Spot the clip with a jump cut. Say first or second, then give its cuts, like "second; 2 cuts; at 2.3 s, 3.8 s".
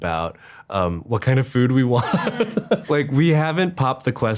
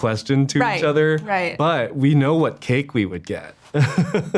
first; 1 cut; at 2.8 s